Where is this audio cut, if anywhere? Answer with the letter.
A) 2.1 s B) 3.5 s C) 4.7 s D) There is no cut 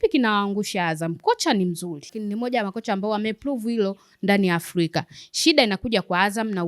A